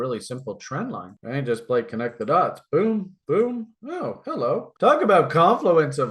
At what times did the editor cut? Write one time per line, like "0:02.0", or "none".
none